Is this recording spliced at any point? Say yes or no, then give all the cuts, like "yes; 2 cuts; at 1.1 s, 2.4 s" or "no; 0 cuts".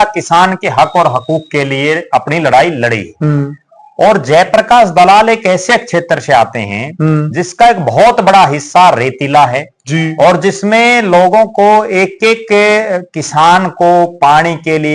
no; 0 cuts